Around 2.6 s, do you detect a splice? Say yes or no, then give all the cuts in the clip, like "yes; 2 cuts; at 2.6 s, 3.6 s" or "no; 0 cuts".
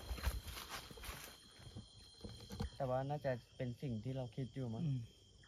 yes; 1 cut; at 2.6 s